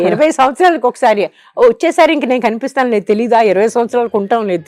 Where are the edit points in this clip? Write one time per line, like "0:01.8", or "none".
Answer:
none